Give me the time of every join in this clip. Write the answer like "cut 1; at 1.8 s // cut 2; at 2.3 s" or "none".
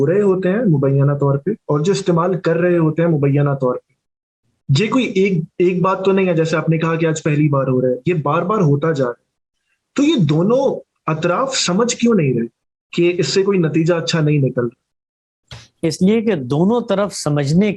none